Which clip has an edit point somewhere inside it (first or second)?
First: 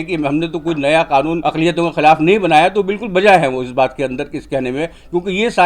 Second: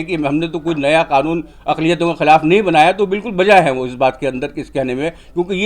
first